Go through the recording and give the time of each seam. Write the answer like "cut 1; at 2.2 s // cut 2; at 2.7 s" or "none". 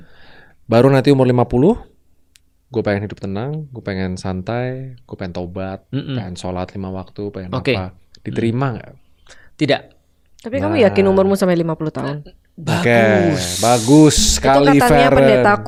none